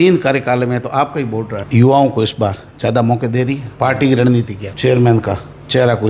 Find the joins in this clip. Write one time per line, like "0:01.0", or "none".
0:01.6
0:04.6

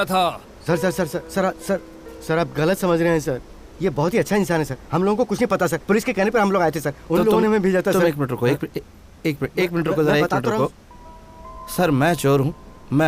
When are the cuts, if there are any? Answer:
0:10.9

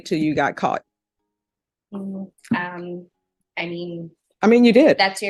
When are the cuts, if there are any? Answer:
none

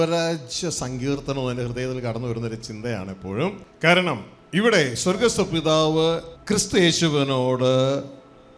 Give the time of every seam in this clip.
0:03.7
0:06.3

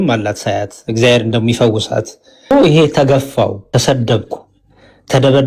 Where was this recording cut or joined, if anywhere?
0:02.5
0:03.6

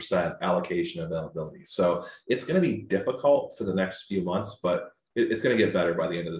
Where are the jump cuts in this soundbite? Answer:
none

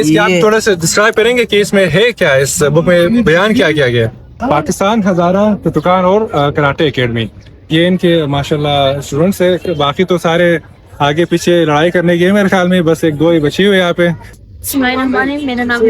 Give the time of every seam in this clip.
0:04.4
0:14.3

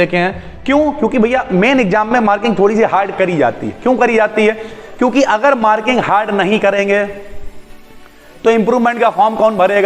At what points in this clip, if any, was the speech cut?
none

